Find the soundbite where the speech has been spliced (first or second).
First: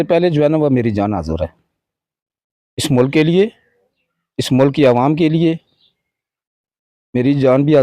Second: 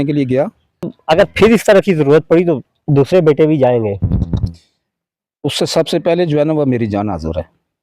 second